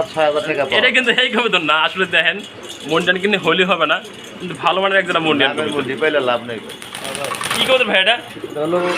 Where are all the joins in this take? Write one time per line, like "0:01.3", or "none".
0:06.8